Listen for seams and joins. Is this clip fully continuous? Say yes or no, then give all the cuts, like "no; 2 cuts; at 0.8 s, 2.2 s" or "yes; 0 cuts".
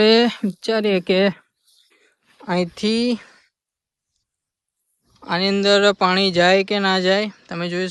yes; 0 cuts